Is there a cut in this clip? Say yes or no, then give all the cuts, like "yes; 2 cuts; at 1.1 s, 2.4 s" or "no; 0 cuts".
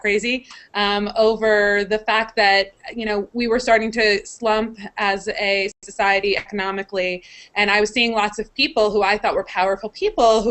no; 0 cuts